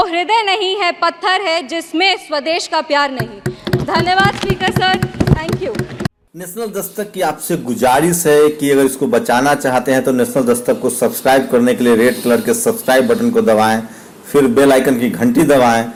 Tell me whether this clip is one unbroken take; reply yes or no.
yes